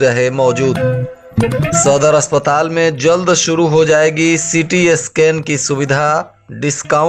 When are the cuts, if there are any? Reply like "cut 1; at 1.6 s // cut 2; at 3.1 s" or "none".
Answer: cut 1; at 0.8 s // cut 2; at 1.8 s